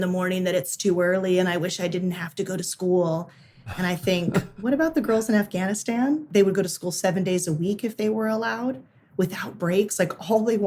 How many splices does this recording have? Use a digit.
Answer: 1